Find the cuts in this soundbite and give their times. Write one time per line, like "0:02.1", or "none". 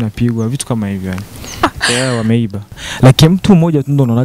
0:01.6
0:02.8